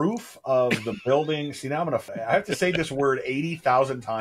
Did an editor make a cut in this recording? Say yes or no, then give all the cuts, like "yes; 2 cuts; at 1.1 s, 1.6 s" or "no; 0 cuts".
yes; 1 cut; at 2.1 s